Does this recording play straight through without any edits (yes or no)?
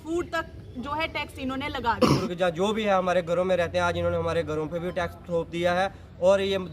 no